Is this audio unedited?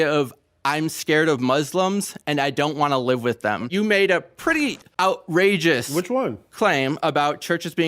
no; 2 cuts; at 3.6 s, 4.8 s

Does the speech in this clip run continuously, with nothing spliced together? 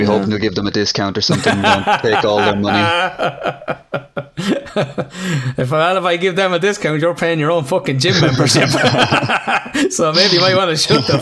yes; 0 cuts

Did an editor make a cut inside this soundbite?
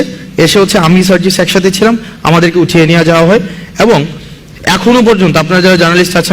no; 0 cuts

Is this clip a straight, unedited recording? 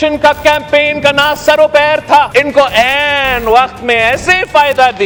yes; 0 cuts

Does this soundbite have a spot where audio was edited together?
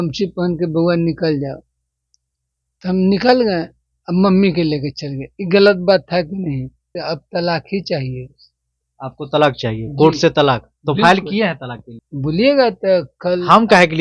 yes; 1 cut; at 6.9 s

